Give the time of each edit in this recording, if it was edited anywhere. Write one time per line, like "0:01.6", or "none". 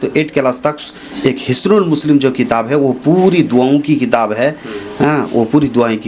none